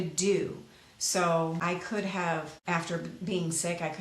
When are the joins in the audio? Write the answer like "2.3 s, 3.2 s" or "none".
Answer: 1.6 s, 2.5 s